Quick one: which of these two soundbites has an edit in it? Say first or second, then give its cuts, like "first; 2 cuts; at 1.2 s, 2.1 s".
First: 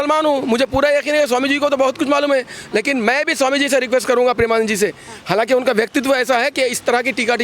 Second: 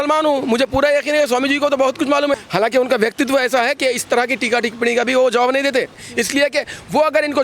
second; 2 cuts; at 2.4 s, 6.1 s